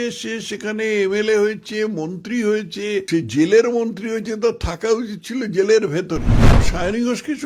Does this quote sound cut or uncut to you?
cut